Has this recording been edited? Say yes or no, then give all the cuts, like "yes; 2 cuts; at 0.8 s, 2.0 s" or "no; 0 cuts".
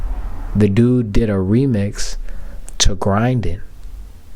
no; 0 cuts